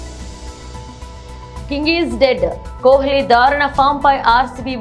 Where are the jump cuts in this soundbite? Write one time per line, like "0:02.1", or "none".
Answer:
0:00.9